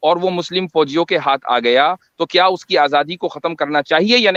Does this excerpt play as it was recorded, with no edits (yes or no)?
yes